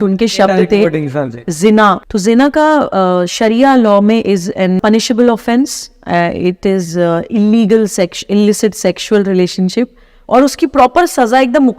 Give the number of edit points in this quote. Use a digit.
2